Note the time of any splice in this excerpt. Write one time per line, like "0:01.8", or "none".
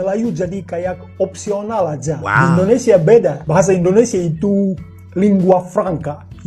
0:02.2